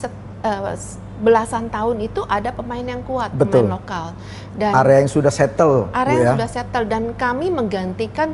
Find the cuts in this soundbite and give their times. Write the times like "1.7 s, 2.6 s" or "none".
none

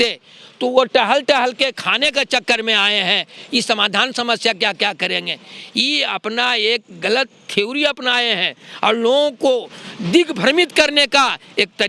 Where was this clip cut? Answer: none

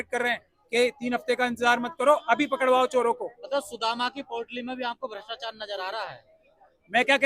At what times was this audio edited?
none

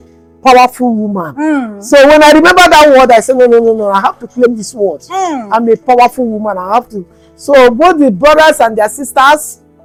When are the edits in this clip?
none

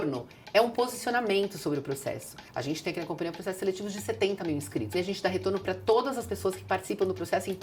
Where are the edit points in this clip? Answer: 2.4 s, 4.9 s

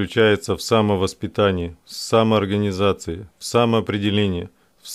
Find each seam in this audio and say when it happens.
none

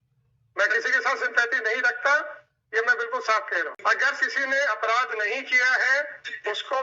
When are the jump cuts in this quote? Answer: 3.8 s

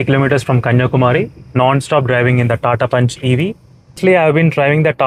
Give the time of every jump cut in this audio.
4.0 s

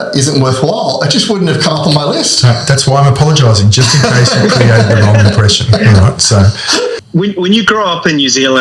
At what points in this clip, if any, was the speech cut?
7.0 s

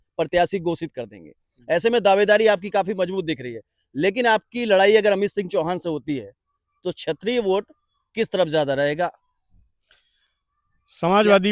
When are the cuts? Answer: none

